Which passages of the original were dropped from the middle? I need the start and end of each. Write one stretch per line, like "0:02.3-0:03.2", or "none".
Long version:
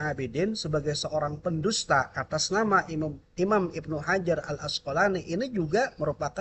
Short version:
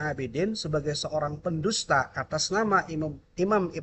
none